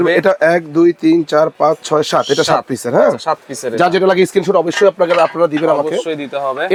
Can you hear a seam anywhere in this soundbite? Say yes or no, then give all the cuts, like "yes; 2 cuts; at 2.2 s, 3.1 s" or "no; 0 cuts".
no; 0 cuts